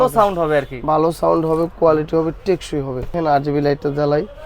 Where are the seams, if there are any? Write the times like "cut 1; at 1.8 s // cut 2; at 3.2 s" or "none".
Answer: cut 1; at 3.1 s